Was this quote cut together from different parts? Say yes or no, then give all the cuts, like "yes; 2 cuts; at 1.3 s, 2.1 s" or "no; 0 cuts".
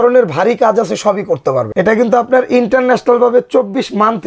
yes; 1 cut; at 1.7 s